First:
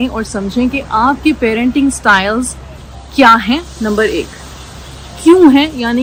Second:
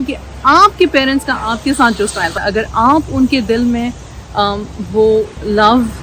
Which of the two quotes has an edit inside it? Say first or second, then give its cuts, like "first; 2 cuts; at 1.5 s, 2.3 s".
second; 1 cut; at 2.3 s